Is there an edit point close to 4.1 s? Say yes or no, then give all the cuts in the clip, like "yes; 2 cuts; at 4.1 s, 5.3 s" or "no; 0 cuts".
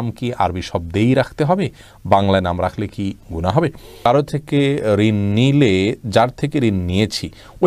yes; 1 cut; at 4.1 s